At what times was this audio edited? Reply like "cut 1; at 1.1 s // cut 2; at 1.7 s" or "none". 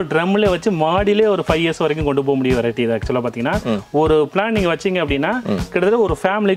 none